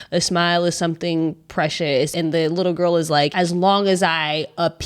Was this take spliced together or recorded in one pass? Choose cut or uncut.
cut